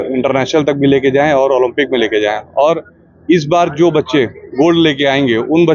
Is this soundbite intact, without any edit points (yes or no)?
yes